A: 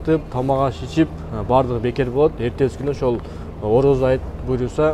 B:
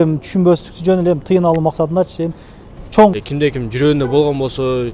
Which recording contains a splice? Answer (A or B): B